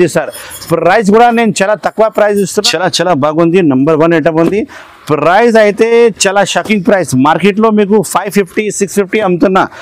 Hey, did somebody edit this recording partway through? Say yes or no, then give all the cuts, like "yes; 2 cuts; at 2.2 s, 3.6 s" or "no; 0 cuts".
yes; 1 cut; at 2.7 s